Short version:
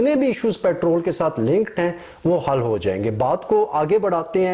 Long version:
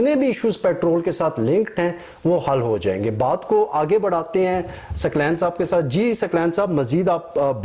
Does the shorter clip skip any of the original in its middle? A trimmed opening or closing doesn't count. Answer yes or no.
no